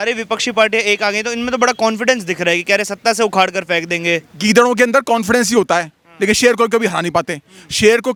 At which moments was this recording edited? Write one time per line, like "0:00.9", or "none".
none